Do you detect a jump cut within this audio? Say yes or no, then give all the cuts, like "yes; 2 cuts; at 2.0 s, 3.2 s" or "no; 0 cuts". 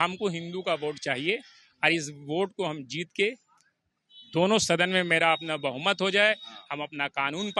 no; 0 cuts